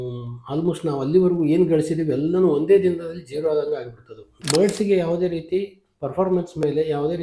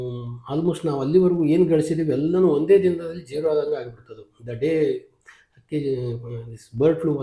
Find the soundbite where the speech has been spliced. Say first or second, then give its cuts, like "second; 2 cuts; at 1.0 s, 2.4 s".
first; 1 cut; at 4.4 s